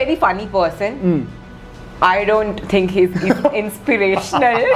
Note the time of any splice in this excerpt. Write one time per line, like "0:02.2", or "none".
none